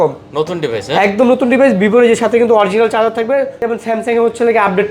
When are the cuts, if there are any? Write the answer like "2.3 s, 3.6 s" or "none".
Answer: 3.7 s

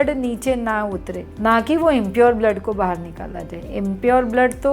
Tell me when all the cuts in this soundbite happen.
none

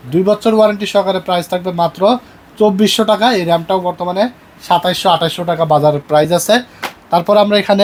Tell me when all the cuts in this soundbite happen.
none

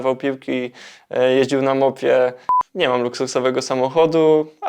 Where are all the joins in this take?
2.5 s

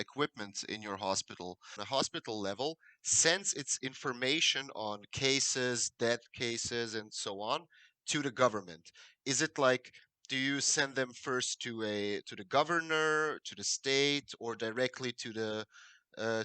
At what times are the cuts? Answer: 1.8 s

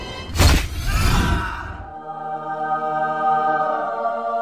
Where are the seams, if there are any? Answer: none

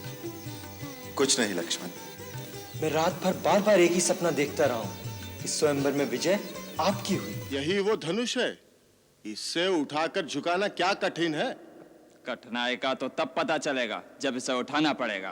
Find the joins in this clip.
7.4 s

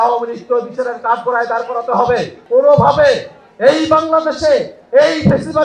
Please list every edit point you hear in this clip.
2.4 s

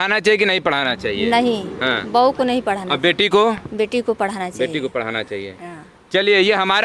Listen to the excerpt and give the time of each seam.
none

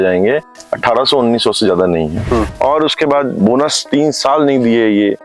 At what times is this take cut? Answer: 2.2 s

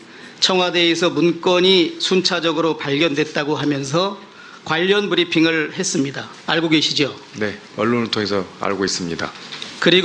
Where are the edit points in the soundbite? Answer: none

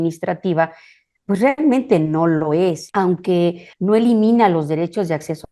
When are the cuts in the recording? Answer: 2.8 s, 3.7 s

